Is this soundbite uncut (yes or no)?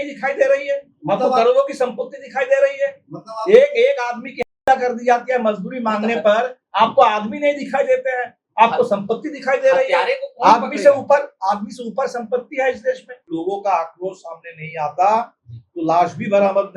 no